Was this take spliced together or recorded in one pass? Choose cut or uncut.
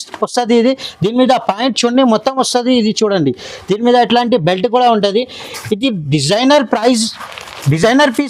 uncut